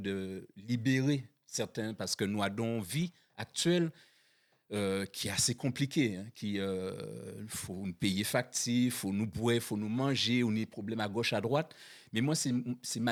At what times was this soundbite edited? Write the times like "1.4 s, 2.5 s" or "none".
none